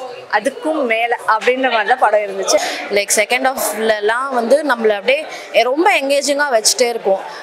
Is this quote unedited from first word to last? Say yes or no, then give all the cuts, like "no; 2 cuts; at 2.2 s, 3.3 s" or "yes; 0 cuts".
no; 1 cut; at 2.6 s